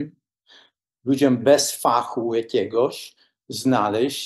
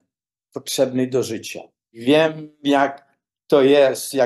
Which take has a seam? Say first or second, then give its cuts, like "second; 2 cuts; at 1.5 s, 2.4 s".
second; 1 cut; at 2.0 s